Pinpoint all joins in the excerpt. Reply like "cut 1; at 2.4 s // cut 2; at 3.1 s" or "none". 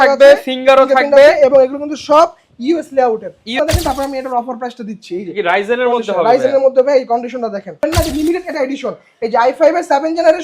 cut 1; at 3.5 s // cut 2; at 7.8 s

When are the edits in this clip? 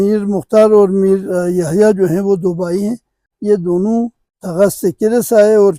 cut 1; at 1.3 s // cut 2; at 3.3 s

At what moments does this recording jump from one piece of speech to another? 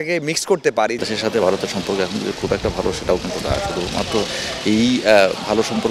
cut 1; at 1.0 s

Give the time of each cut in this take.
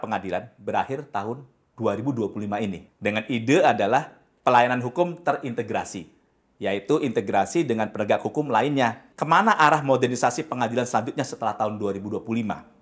cut 1; at 2.9 s // cut 2; at 9.1 s

